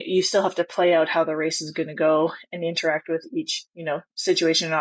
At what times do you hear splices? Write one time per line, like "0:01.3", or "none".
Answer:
none